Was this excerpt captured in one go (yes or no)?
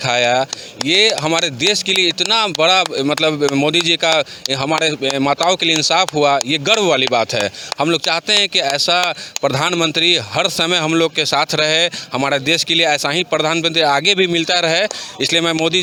yes